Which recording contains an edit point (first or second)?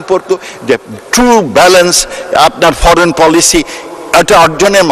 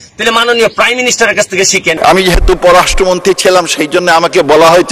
second